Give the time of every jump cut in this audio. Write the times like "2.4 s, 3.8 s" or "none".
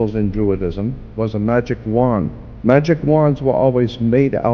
1.0 s, 2.4 s